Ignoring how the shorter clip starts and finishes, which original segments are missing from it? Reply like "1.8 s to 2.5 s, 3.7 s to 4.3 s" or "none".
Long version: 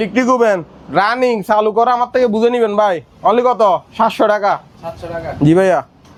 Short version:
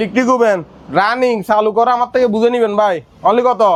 none